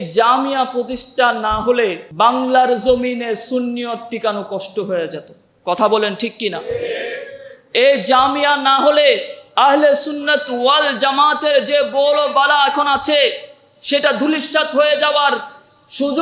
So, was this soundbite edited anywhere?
yes; 2 cuts; at 2.0 s, 9.4 s

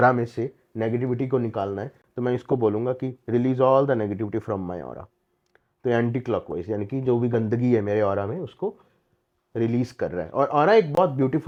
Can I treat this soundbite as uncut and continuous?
yes; 0 cuts

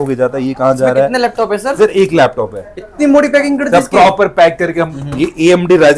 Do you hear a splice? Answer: yes; 1 cut; at 5.0 s

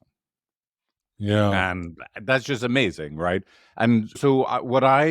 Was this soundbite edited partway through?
no; 0 cuts

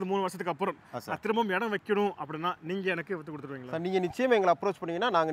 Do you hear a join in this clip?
no; 0 cuts

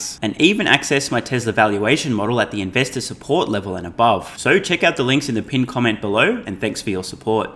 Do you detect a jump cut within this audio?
no; 0 cuts

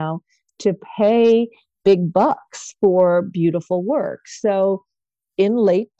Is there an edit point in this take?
no; 0 cuts

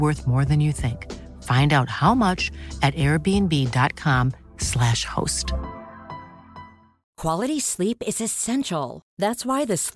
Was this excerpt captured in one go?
no; 1 cut; at 7.0 s

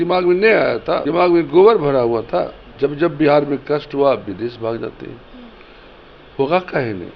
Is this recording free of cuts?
no; 2 cuts; at 1.0 s, 2.6 s

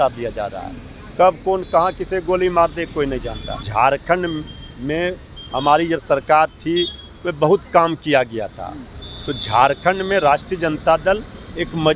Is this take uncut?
no; 1 cut; at 3.7 s

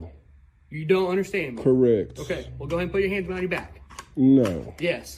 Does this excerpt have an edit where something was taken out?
no; 0 cuts

